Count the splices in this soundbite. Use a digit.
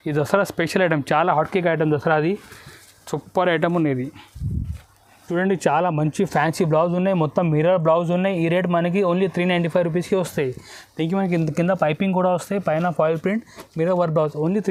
0